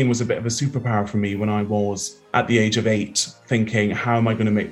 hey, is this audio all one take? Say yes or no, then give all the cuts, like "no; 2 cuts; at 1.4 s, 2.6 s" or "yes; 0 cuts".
no; 1 cut; at 2.1 s